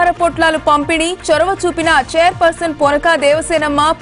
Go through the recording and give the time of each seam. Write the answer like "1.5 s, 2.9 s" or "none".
none